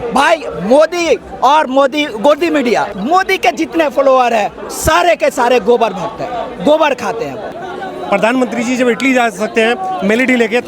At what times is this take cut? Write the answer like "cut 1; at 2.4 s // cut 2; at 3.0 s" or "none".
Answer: cut 1; at 2.9 s // cut 2; at 7.6 s